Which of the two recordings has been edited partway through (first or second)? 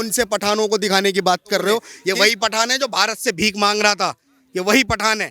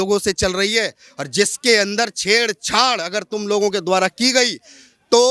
first